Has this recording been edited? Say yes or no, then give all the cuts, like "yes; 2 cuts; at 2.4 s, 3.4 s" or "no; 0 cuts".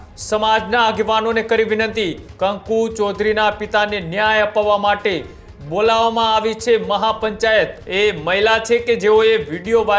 yes; 2 cuts; at 2.2 s, 7.8 s